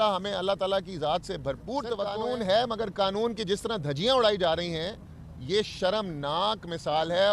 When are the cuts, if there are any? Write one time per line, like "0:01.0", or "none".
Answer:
0:02.1